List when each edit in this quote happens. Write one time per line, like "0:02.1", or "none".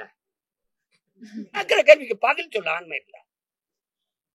0:01.7

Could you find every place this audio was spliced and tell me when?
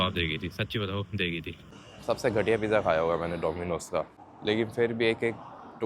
0:01.8
0:04.2

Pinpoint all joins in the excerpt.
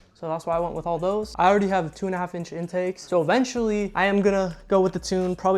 0:01.3
0:03.0
0:03.9

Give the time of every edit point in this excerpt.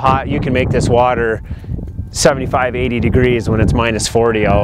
none

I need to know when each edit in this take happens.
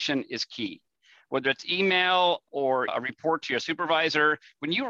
0:02.9

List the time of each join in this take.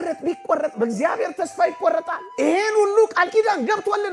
0:02.2

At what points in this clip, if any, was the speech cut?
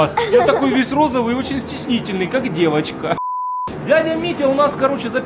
0:03.5

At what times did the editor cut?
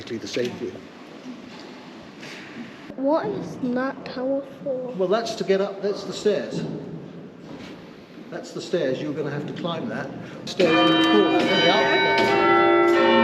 0:02.9
0:10.4

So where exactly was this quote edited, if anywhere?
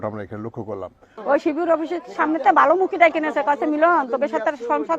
0:01.0

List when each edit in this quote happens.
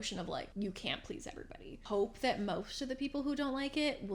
0:01.8

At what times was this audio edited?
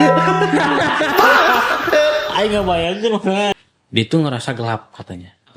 0:03.5

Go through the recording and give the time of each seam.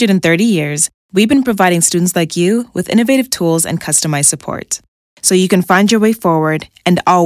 none

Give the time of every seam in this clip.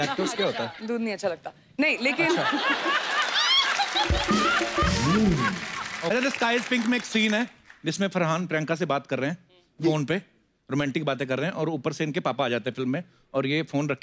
0:06.1

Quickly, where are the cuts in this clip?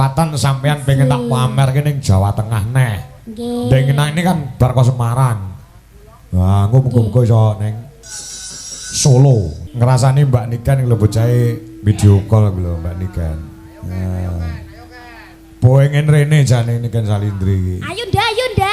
0:09.6

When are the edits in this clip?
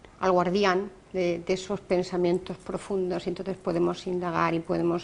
0:04.0

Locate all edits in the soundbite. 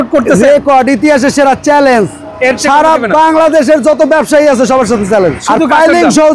0:05.4

